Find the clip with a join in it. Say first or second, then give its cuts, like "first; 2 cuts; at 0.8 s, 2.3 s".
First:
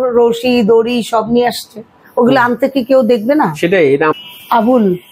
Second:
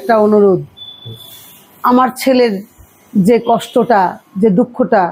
first; 1 cut; at 4.1 s